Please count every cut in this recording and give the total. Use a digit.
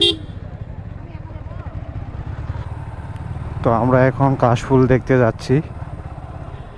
1